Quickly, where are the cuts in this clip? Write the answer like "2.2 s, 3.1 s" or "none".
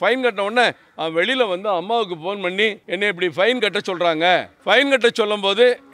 2.8 s, 4.5 s